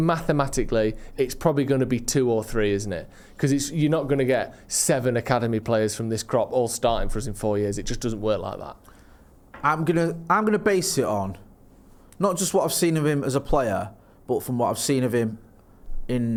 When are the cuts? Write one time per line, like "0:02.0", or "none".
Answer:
none